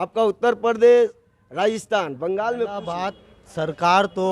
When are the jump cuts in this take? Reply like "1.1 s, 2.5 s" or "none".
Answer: 2.8 s